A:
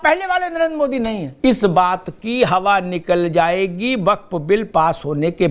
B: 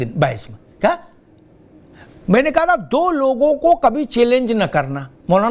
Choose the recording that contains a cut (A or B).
A